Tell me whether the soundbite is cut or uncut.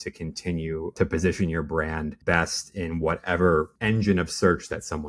cut